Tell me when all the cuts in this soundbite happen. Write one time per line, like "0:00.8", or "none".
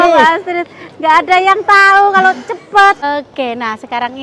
0:03.1